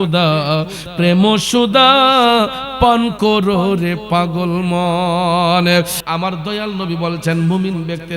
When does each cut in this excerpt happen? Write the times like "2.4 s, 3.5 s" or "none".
6.0 s